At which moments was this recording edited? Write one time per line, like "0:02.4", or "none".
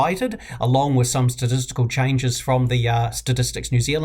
0:03.1